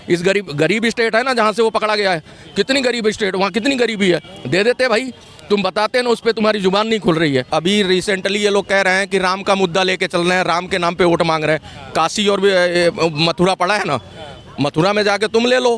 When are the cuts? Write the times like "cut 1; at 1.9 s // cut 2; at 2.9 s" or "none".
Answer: cut 1; at 7.5 s

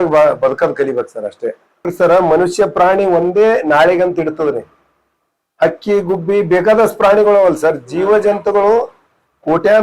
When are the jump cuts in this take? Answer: cut 1; at 1.9 s

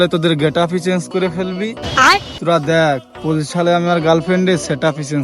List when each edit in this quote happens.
none

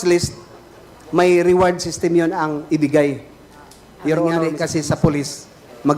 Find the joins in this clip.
cut 1; at 4.4 s

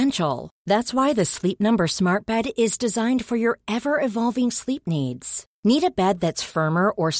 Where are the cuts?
none

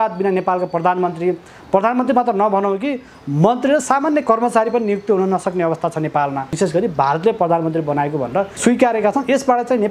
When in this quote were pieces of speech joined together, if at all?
cut 1; at 6.5 s // cut 2; at 8.5 s

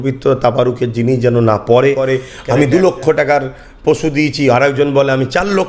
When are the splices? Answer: cut 1; at 2.0 s

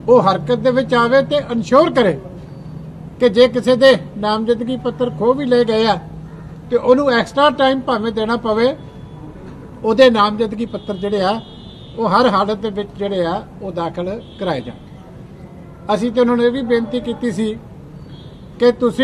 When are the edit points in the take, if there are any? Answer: none

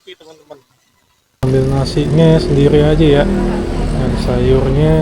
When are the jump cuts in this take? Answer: cut 1; at 1.4 s

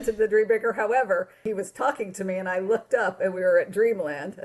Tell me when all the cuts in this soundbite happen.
cut 1; at 1.4 s

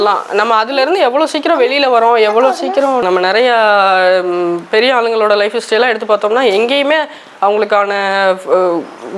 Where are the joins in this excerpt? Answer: cut 1; at 3.0 s

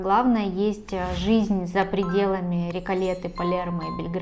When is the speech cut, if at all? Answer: none

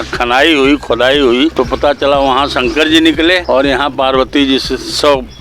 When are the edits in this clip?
cut 1; at 1.5 s // cut 2; at 3.4 s

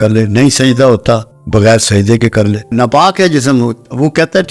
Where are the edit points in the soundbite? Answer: cut 1; at 1.3 s // cut 2; at 2.7 s

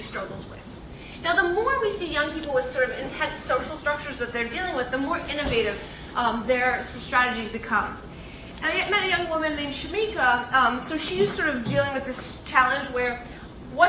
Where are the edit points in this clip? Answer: none

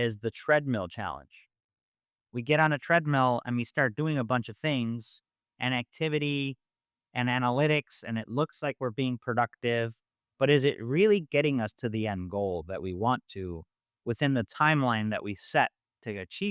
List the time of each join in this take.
none

